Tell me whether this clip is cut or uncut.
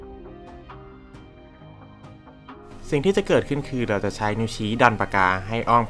cut